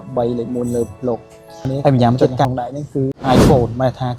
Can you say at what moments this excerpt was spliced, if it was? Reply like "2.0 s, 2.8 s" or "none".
2.4 s